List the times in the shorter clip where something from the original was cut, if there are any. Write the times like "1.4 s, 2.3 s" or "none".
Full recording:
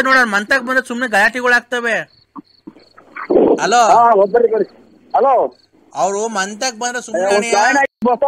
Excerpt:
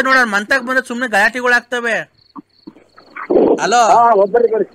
none